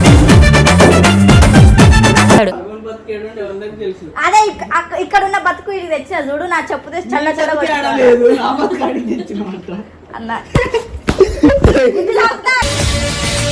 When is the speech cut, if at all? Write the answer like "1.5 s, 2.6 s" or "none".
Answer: 2.6 s